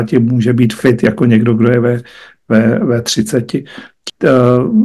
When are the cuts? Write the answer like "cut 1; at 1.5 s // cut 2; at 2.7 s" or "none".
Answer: cut 1; at 3.9 s